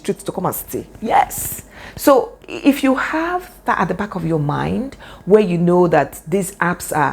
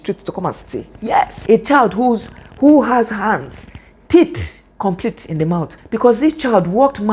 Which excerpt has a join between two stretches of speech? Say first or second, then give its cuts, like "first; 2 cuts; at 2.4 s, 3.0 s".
second; 2 cuts; at 1.4 s, 5.8 s